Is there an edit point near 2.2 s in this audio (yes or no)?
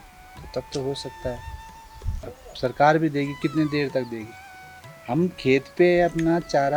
yes